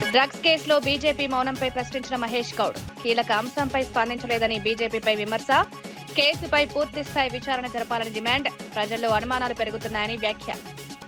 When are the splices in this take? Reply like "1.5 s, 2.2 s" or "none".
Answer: none